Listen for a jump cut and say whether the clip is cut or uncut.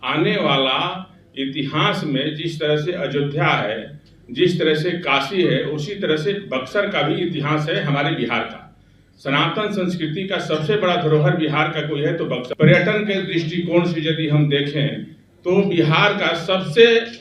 cut